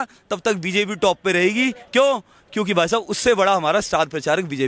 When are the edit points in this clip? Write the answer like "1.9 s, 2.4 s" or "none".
none